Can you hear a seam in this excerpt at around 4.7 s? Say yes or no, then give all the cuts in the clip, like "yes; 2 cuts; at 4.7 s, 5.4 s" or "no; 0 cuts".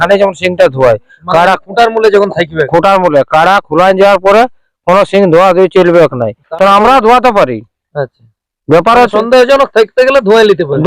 no; 1 cut; at 6.4 s